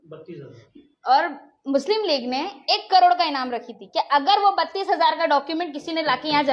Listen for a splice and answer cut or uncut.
uncut